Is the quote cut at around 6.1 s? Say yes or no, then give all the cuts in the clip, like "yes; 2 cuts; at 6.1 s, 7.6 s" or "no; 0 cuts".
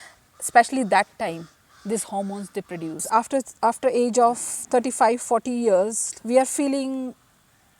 yes; 2 cuts; at 3.0 s, 6.1 s